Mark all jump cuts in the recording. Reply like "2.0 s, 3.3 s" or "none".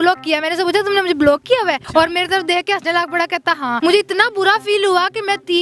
1.8 s, 3.8 s

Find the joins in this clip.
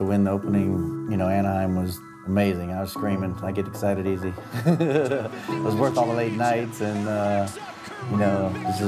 1.0 s, 2.1 s

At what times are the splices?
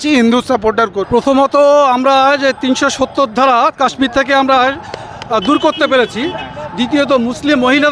1.0 s

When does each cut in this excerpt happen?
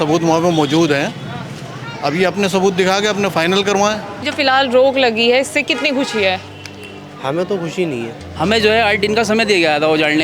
4.1 s, 8.2 s

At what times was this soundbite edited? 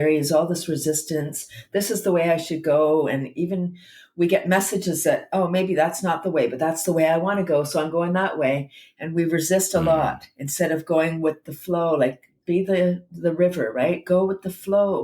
12.4 s

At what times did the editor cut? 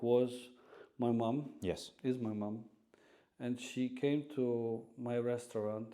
none

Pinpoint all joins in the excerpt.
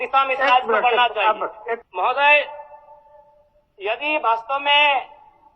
1.9 s

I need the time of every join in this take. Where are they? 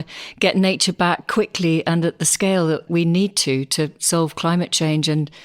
2.8 s

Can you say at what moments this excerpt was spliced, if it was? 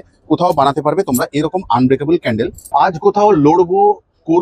2.6 s

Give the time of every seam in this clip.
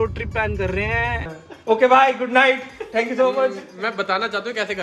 1.3 s

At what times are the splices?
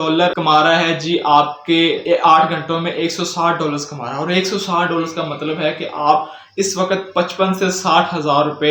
none

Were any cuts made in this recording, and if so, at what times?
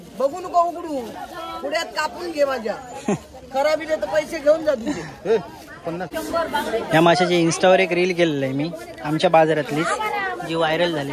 6.1 s

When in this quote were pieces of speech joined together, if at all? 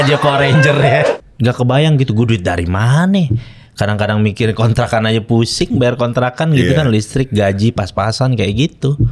1.1 s

